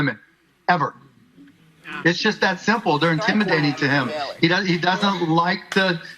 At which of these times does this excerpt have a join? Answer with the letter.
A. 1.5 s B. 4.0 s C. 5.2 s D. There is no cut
D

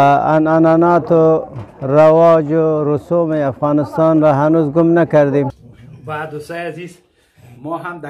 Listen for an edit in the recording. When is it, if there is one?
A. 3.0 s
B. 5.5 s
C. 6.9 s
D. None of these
B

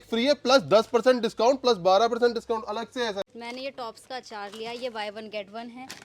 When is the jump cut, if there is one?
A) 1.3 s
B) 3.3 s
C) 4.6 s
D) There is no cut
B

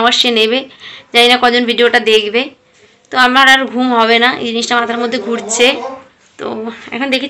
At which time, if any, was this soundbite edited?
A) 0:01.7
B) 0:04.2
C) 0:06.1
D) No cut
D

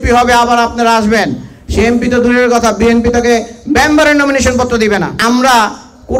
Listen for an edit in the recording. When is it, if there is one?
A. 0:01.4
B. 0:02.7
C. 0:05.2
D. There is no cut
C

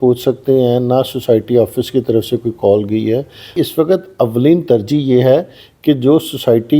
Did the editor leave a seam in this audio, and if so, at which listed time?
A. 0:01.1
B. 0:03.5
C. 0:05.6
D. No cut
B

